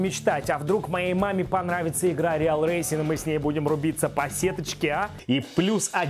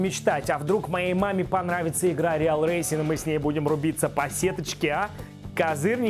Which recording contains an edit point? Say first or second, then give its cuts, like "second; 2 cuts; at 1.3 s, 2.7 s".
first; 1 cut; at 5.2 s